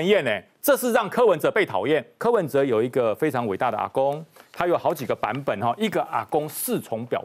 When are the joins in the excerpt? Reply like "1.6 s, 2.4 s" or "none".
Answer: 2.1 s